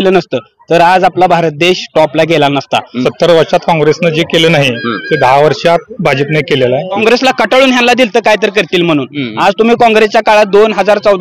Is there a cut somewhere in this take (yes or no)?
yes